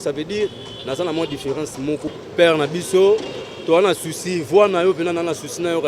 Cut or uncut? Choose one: cut